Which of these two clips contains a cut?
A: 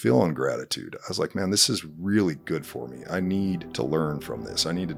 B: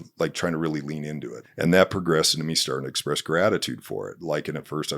B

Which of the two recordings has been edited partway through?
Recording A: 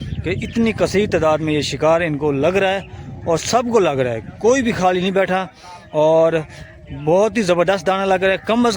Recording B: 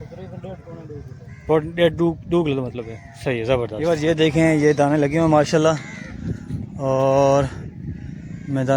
B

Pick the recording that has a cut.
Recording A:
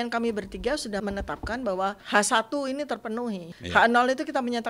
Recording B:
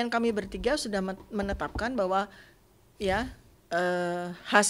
A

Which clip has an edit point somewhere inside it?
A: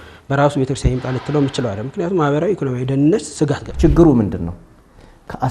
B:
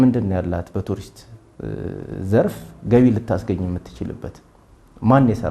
A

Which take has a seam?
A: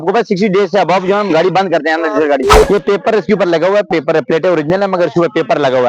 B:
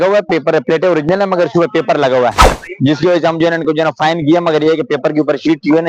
A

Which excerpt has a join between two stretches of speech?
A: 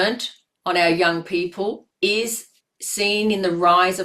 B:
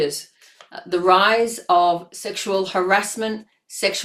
A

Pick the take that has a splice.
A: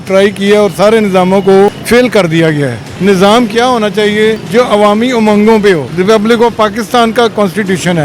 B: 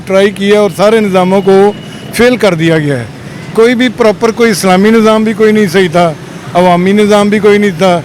A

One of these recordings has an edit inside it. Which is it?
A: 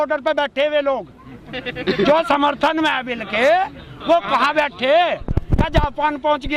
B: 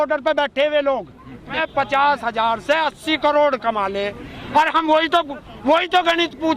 B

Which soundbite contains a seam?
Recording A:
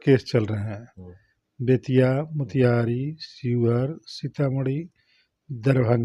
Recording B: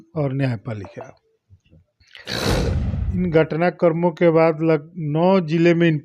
B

